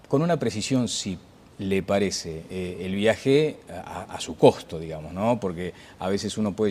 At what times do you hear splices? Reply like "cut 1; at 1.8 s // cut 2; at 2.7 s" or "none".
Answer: cut 1; at 4.6 s